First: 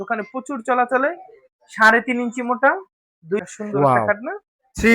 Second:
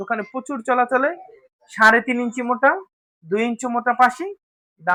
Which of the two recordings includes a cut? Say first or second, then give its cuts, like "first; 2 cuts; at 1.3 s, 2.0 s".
first; 1 cut; at 3.4 s